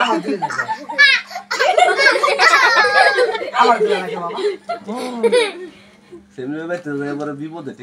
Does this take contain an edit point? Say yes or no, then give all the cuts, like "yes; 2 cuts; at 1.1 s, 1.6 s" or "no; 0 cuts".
no; 0 cuts